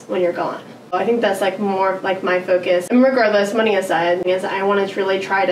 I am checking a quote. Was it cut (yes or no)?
yes